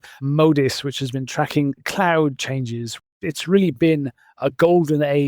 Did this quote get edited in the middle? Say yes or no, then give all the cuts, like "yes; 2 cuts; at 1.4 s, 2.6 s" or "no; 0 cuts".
yes; 1 cut; at 3.1 s